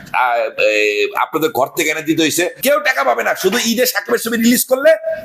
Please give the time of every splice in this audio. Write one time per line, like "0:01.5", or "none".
0:02.6